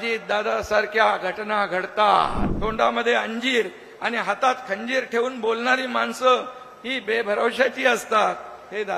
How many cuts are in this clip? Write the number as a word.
one